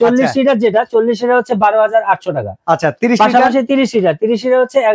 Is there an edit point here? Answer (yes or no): no